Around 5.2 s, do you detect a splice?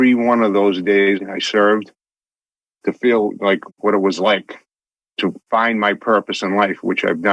yes; 2 cuts; at 1.2 s, 5.2 s

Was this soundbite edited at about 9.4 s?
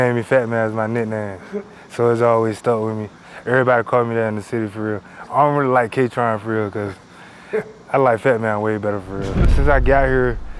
yes; 1 cut; at 9.4 s

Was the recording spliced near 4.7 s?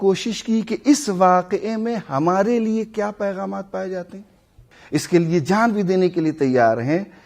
yes; 1 cut; at 4.7 s

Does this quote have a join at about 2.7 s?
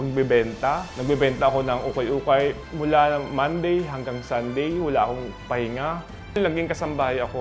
yes; 3 cuts; at 0.9 s, 2.7 s, 6.3 s

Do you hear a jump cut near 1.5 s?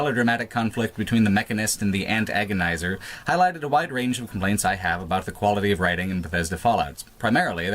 yes; 1 cut; at 1.5 s

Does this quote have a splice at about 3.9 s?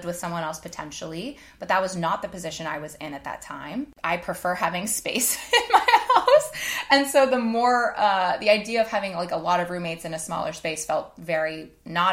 yes; 1 cut; at 3.9 s

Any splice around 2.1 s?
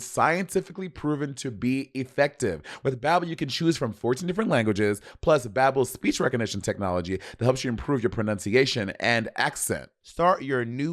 no; 1 cut; at 10.0 s

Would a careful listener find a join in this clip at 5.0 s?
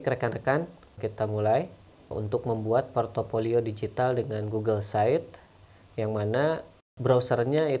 no; 3 cuts; at 1.0 s, 2.1 s, 6.9 s

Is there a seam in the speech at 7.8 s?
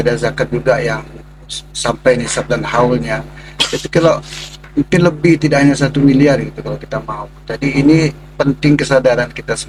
no; 0 cuts

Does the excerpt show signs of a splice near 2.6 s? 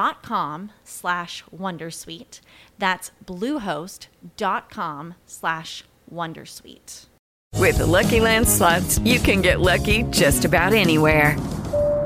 no; 1 cut; at 7.1 s

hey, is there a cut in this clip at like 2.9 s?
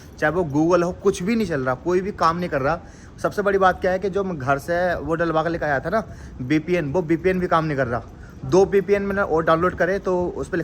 no; 0 cuts

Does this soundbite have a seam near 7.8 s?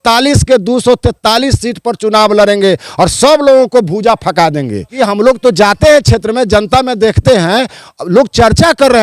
no; 1 cut; at 4.9 s

